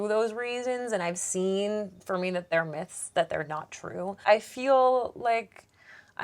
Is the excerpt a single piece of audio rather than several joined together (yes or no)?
no